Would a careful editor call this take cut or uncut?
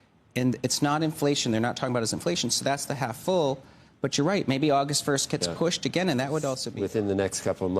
cut